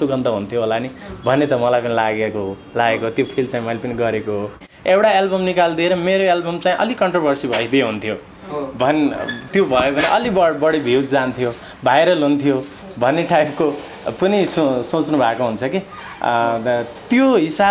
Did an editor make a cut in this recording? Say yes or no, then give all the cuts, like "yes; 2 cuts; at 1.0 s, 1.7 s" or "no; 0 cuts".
yes; 1 cut; at 4.7 s